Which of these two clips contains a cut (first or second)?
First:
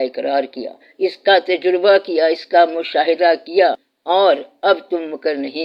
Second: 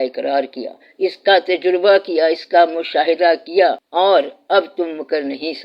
second